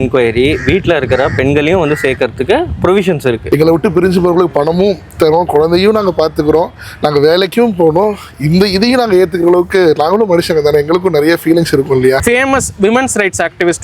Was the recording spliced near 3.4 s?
yes; 2 cuts; at 3.4 s, 12.2 s

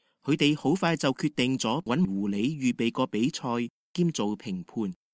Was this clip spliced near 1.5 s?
no; 1 cut; at 3.8 s

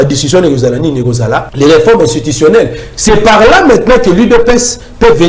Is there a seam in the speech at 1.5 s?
yes; 1 cut; at 1.5 s

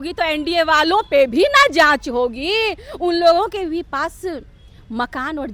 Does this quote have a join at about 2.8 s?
no; 0 cuts

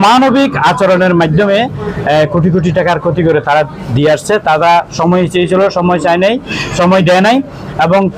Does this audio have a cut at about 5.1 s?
no; 0 cuts

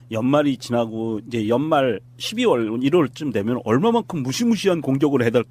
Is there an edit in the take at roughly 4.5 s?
no; 1 cut; at 2.4 s

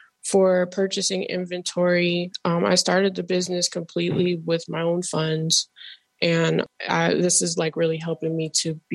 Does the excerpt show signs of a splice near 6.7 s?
yes; 1 cut; at 6.7 s

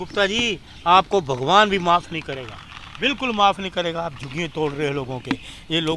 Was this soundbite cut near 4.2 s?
no; 0 cuts

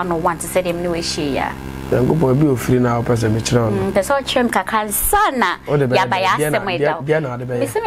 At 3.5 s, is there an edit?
no; 1 cut; at 1.9 s

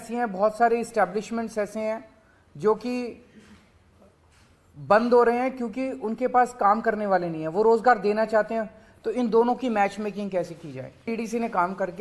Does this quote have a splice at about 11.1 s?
yes; 1 cut; at 11.1 s

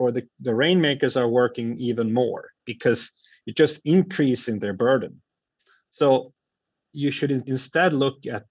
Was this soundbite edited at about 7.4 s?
yes; 1 cut; at 7.4 s

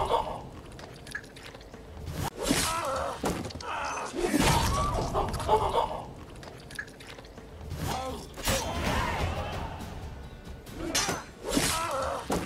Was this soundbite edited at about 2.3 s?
yes; 2 cuts; at 2.3 s, 7.9 s

